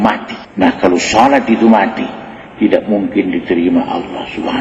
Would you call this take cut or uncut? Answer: uncut